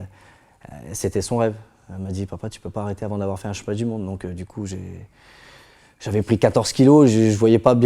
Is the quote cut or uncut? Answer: uncut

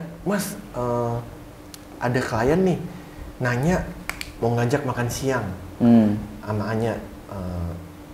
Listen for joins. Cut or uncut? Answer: uncut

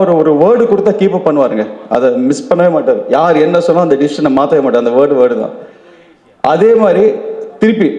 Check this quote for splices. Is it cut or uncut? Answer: uncut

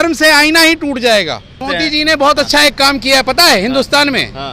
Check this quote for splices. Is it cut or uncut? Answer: cut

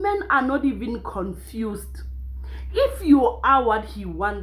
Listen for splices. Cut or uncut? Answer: uncut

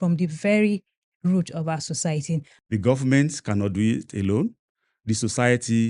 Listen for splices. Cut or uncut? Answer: cut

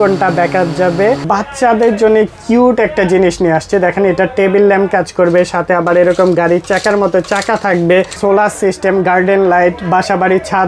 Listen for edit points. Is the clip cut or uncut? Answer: cut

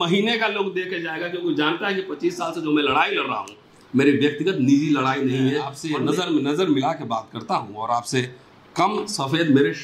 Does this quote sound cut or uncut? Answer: cut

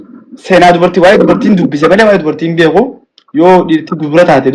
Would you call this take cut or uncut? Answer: uncut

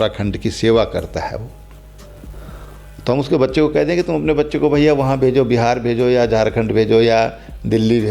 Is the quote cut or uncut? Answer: uncut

